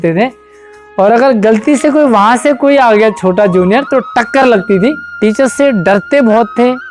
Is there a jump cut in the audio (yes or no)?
yes